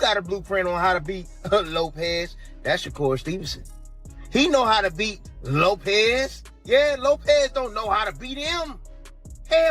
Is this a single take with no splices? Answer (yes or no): no